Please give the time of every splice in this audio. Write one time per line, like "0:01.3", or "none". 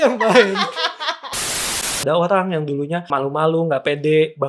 0:01.5
0:03.1